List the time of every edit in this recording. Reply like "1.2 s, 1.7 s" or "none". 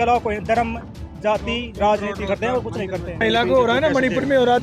3.2 s

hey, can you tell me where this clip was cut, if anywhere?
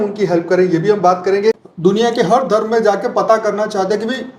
1.7 s

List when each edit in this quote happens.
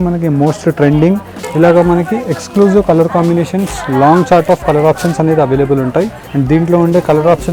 1.3 s, 6.2 s

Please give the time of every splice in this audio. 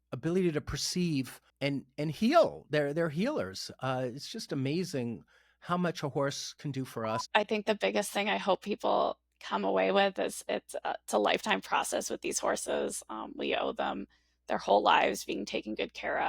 7.2 s

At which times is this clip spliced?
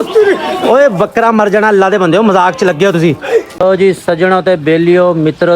3.5 s

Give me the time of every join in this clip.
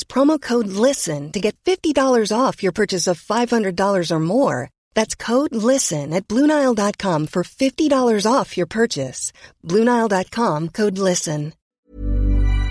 11.6 s

